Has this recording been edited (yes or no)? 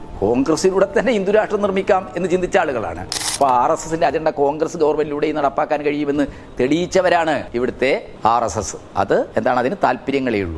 yes